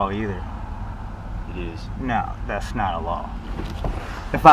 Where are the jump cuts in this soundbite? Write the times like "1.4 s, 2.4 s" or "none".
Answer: none